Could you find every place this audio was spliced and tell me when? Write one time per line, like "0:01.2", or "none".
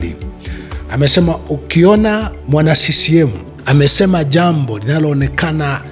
0:02.3
0:03.5